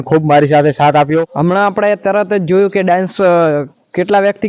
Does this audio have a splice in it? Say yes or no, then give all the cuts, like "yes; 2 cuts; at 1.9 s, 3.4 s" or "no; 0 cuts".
yes; 1 cut; at 1.3 s